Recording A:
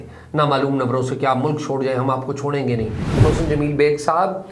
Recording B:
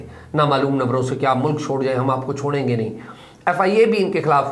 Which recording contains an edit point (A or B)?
A